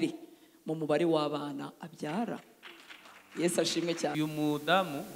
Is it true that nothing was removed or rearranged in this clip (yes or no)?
no